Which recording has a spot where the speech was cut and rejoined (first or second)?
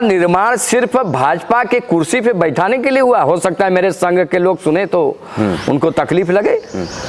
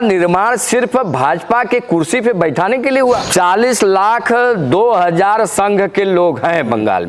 second